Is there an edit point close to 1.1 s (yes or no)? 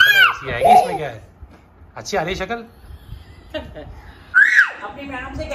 no